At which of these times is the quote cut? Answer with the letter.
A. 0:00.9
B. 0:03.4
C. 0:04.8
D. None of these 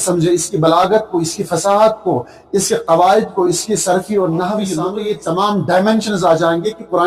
C